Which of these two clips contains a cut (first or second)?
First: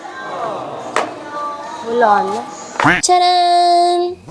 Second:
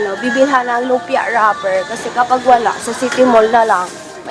first